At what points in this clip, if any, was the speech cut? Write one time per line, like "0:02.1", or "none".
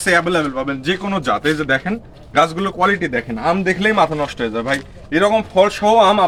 none